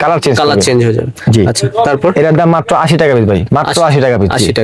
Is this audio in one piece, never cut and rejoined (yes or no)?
yes